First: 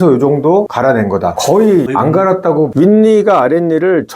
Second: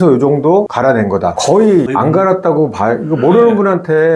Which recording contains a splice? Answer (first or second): first